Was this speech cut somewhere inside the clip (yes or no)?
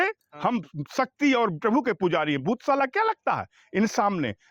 no